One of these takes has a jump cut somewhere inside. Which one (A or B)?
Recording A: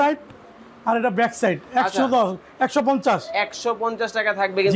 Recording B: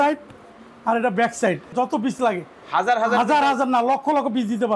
B